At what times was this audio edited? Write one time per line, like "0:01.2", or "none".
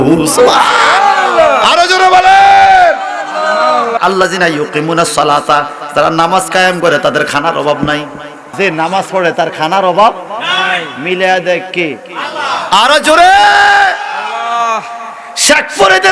0:04.0
0:08.5